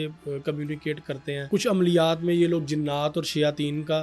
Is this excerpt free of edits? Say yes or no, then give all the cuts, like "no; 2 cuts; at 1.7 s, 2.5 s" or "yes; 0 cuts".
no; 1 cut; at 1.5 s